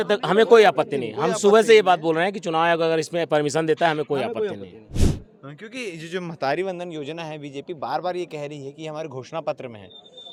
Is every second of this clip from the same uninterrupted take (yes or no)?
yes